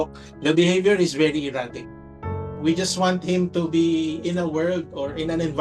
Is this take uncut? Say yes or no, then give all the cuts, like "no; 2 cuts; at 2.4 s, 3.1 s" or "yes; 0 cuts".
no; 1 cut; at 2.2 s